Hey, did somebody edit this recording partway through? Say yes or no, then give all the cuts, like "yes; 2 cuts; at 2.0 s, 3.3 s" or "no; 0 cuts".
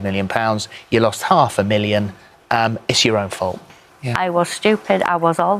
yes; 1 cut; at 3.8 s